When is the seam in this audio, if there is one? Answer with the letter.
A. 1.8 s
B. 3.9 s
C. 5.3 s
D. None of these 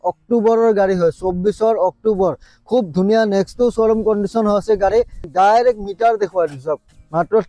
C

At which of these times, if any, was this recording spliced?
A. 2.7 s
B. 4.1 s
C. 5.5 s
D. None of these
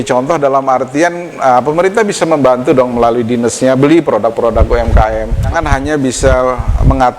C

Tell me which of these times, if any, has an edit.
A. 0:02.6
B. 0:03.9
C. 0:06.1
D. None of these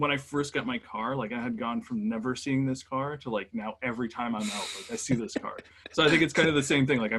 D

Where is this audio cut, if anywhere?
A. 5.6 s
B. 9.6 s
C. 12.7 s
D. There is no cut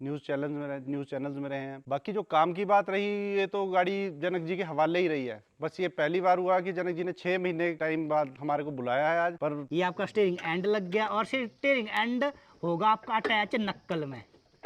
B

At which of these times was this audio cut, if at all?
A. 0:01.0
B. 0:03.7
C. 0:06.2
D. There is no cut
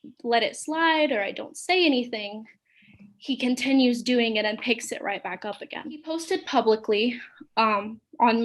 C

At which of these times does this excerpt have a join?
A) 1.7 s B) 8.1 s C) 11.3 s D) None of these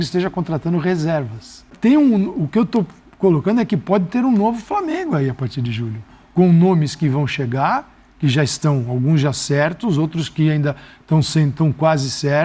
A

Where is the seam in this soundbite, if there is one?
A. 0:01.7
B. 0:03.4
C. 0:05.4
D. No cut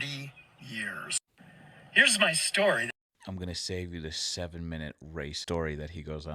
C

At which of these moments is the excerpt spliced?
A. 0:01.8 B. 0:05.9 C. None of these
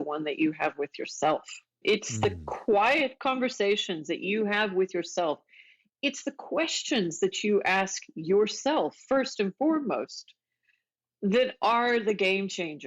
A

